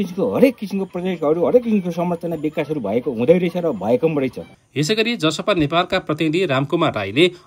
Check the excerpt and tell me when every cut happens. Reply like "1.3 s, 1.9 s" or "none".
none